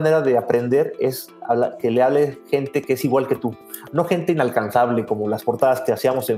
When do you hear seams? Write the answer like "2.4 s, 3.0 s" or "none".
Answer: none